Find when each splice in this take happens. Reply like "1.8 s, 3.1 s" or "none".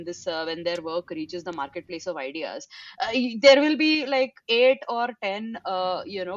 none

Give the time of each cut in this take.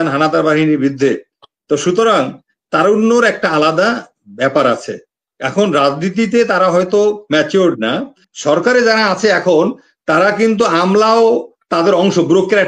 8.3 s

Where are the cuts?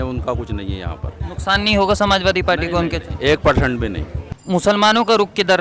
4.1 s

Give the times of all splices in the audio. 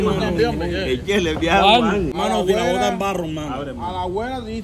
2.1 s

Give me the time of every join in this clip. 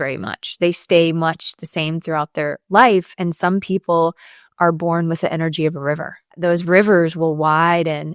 6.4 s

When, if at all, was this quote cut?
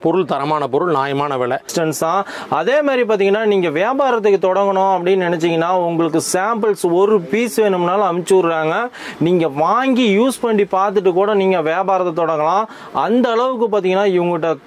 1.7 s

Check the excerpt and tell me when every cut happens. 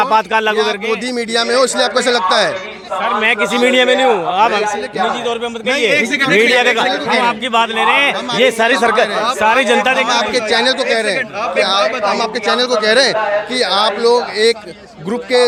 none

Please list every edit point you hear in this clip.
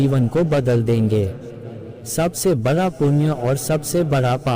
1.8 s

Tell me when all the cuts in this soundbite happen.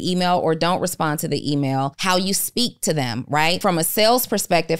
2.0 s, 3.6 s

